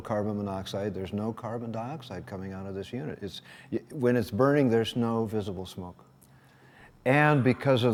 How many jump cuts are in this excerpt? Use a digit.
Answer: 0